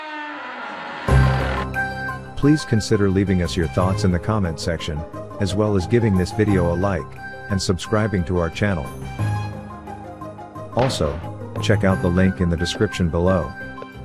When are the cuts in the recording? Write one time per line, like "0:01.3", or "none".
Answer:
0:02.3